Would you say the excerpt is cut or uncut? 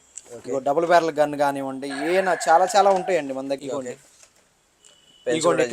cut